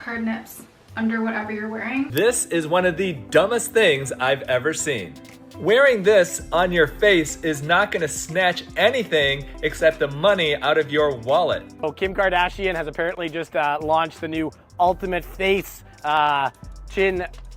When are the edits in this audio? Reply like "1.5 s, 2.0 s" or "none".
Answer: 2.1 s, 11.7 s